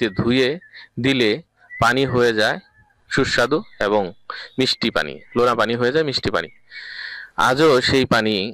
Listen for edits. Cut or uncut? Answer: uncut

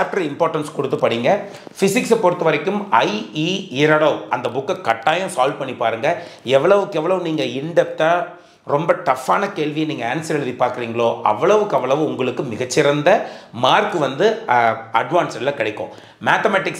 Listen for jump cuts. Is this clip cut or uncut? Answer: uncut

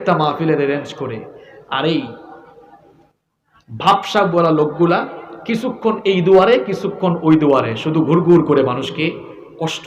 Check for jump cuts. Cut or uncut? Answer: uncut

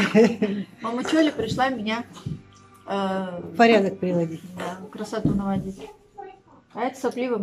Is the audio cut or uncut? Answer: uncut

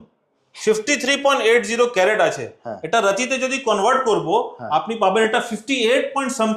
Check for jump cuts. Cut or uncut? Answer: uncut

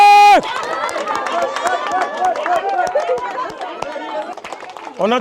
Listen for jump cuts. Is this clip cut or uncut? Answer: cut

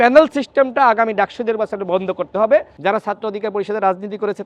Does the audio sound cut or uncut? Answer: cut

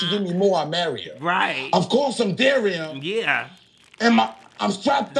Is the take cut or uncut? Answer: uncut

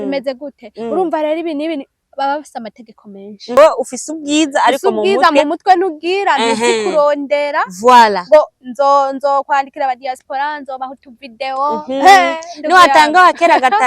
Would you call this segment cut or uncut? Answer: cut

